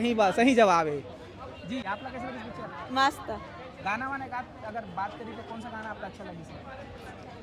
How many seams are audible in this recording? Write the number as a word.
zero